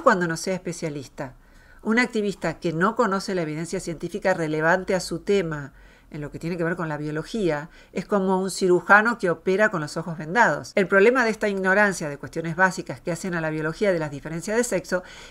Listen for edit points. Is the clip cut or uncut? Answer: cut